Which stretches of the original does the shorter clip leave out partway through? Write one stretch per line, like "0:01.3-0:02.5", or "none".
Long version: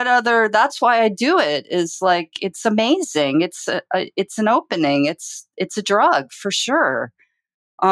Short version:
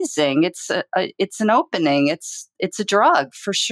none